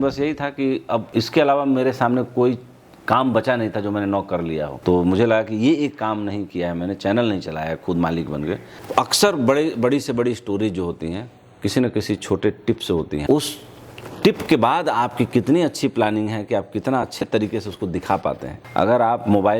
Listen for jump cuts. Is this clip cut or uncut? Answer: cut